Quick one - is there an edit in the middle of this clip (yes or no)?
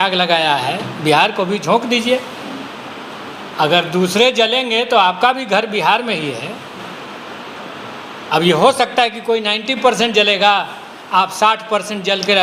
no